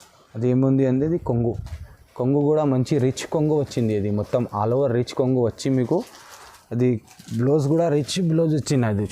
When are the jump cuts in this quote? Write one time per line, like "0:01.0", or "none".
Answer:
none